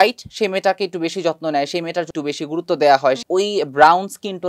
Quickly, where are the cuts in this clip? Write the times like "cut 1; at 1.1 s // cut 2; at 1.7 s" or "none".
cut 1; at 2.1 s // cut 2; at 3.2 s